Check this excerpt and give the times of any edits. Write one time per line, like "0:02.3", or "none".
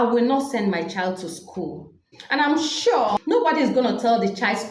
0:02.1
0:03.2